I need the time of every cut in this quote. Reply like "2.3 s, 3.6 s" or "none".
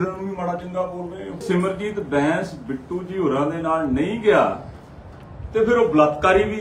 1.4 s